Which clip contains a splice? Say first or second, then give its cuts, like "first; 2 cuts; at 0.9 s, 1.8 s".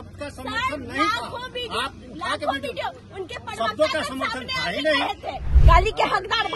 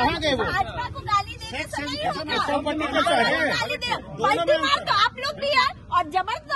first; 1 cut; at 5.5 s